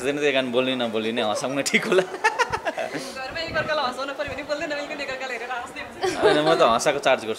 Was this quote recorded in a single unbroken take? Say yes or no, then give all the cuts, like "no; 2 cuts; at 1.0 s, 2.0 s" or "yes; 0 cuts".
yes; 0 cuts